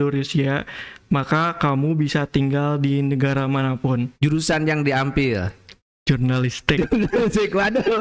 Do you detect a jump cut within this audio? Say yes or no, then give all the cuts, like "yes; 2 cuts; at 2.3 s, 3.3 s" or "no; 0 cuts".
yes; 1 cut; at 4.1 s